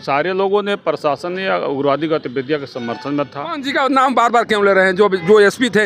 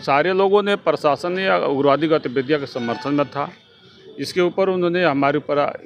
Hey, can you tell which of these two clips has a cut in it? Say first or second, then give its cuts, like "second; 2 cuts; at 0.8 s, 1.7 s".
first; 1 cut; at 3.6 s